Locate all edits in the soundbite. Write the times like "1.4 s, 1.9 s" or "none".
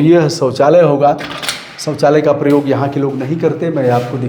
none